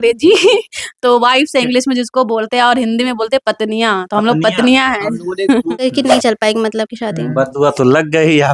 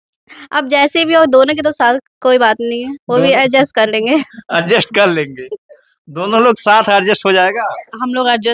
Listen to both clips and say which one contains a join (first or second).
first